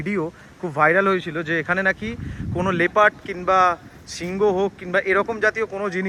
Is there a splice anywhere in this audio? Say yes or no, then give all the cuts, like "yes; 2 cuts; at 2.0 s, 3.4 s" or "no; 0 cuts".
no; 0 cuts